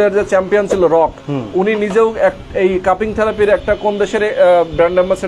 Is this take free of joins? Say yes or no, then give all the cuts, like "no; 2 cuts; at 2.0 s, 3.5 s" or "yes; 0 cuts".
yes; 0 cuts